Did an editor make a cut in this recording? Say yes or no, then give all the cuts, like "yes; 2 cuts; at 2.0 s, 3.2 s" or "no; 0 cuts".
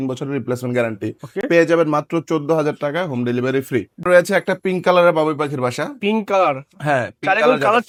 no; 0 cuts